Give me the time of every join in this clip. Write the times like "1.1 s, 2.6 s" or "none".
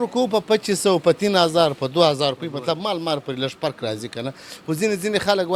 none